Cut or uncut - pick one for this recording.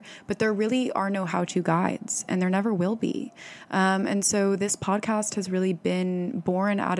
uncut